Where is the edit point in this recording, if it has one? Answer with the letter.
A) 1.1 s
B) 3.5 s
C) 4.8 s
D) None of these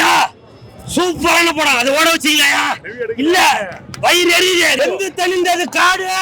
C